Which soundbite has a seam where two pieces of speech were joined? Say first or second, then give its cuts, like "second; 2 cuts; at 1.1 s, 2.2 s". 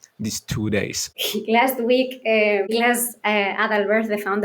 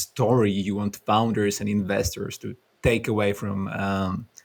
first; 2 cuts; at 1.1 s, 2.7 s